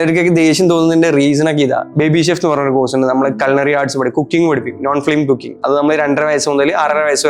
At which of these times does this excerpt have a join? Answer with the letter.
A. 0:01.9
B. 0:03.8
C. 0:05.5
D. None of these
A